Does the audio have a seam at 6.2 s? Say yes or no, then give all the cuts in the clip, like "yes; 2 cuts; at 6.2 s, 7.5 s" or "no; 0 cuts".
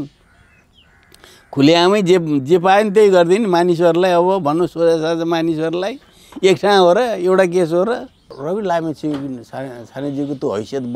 no; 1 cut; at 8.3 s